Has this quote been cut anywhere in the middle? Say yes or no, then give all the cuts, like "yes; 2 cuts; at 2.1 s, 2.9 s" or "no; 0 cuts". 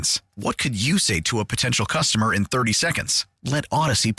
no; 0 cuts